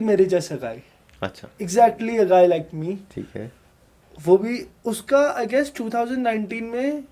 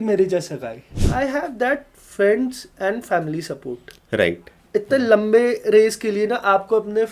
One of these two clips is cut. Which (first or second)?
second